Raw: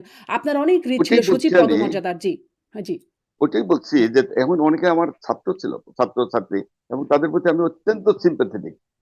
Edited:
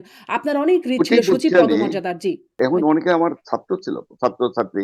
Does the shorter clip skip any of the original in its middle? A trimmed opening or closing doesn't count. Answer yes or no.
yes